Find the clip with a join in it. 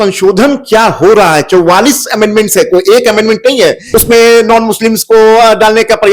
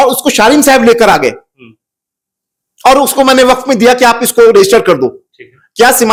first; 1 cut; at 3.8 s

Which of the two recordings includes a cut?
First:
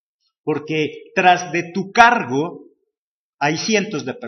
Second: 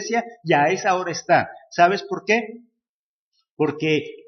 second; 1 cut; at 1.1 s

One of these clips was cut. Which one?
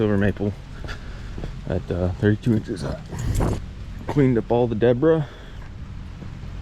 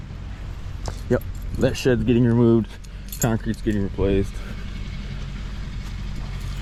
first; 1 cut; at 3.6 s

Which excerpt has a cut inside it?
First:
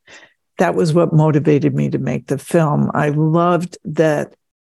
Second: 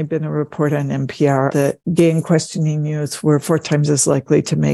second; 1 cut; at 1.5 s

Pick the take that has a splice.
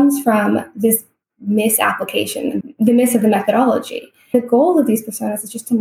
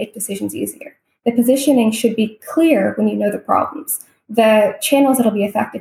first; 2 cuts; at 2.6 s, 4.3 s

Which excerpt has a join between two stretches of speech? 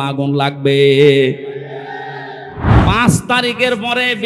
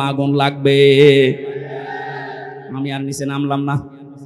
first; 1 cut; at 2.6 s

